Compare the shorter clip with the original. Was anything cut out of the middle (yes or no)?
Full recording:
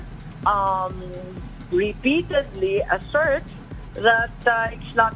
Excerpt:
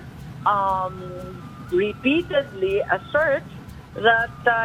no